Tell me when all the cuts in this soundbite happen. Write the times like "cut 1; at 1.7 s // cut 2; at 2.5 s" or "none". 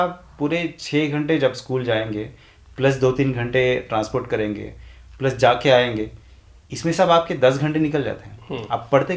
none